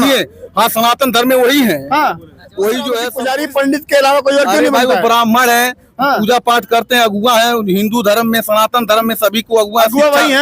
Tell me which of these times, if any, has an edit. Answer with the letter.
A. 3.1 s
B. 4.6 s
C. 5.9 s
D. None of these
A